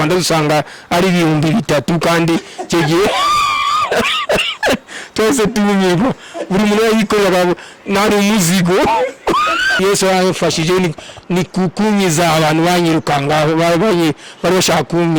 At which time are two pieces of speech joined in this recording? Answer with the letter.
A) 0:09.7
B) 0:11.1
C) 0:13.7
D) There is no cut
A